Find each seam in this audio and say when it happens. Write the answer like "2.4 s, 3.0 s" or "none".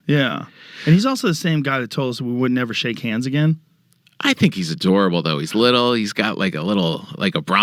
none